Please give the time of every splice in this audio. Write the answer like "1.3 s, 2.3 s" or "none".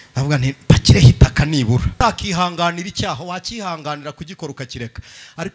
1.9 s